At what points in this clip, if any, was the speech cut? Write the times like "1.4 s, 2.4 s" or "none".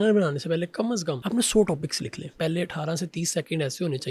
1.2 s, 2.3 s